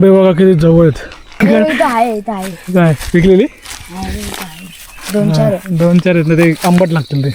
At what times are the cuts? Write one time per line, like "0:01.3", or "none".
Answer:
0:01.3